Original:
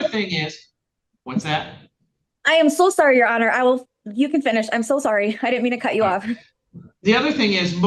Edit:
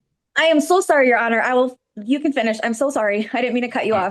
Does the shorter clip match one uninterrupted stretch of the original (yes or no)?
yes